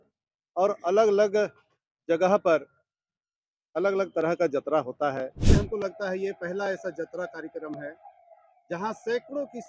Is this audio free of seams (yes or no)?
no